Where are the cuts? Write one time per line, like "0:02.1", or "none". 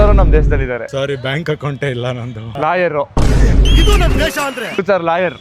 0:00.9